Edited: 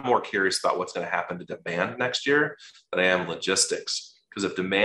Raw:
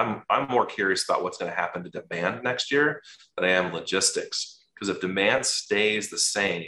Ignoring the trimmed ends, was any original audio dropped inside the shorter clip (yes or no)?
no